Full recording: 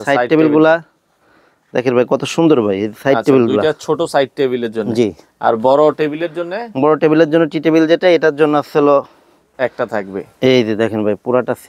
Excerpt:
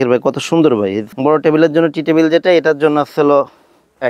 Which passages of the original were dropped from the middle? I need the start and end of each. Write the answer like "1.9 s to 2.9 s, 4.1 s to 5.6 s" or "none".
2.9 s to 6.6 s